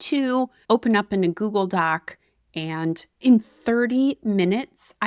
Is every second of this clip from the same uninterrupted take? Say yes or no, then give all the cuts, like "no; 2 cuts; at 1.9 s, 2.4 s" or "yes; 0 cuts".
no; 1 cut; at 3.2 s